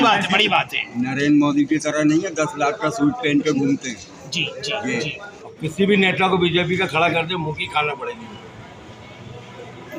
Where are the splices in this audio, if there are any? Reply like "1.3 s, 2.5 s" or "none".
5.5 s